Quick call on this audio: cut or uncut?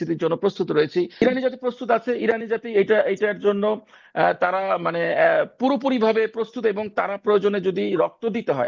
cut